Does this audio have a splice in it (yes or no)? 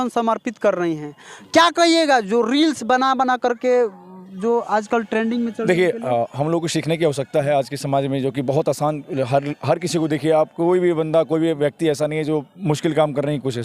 no